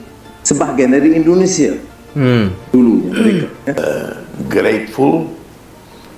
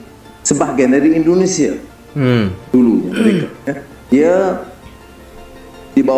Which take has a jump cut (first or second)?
first